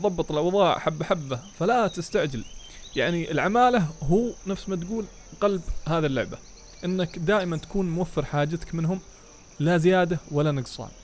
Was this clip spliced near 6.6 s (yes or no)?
no